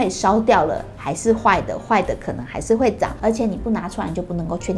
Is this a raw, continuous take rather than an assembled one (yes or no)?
no